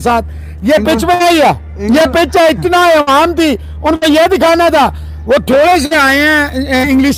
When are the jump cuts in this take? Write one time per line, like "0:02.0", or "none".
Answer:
none